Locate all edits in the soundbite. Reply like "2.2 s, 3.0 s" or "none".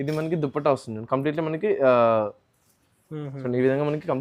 none